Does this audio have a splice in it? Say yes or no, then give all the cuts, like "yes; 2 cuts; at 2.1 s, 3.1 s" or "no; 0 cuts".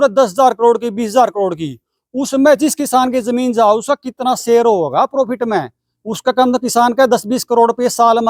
no; 0 cuts